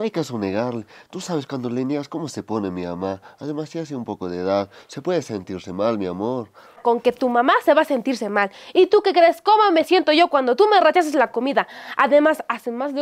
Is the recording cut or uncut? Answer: uncut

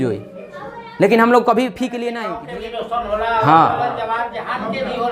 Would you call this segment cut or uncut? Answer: cut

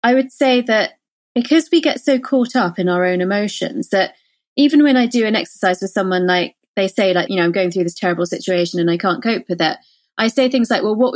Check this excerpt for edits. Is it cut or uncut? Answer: cut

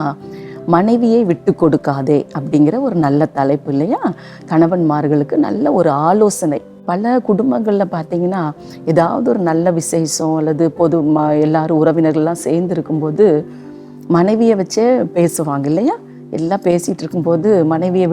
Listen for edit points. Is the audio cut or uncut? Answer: uncut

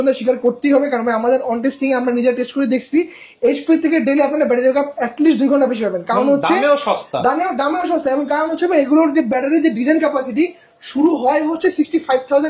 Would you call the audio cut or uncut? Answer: uncut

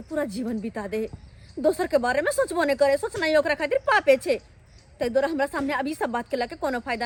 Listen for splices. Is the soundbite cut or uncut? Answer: uncut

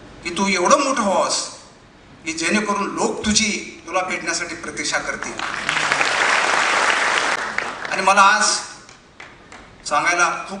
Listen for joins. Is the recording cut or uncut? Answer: cut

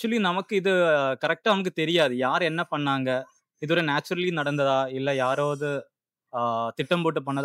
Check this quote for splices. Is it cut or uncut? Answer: uncut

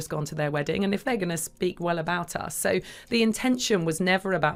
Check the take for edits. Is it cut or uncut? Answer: uncut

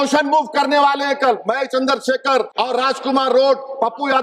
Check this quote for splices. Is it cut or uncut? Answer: cut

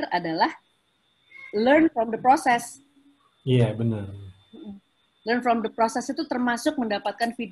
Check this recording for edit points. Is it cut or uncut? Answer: uncut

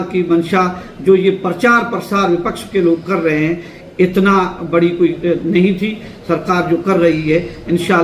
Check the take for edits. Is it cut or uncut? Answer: uncut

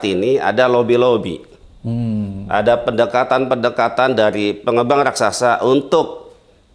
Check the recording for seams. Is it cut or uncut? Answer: uncut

